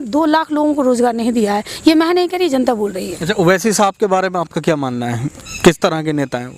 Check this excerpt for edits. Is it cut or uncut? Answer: cut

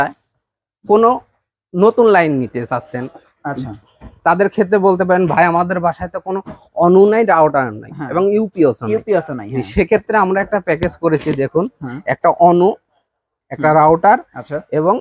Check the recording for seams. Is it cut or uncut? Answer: uncut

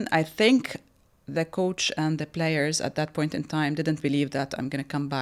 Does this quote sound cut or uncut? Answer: uncut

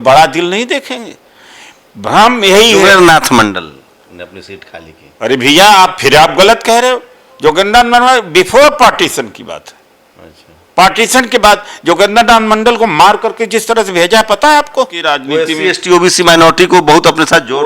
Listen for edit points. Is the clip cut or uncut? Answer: cut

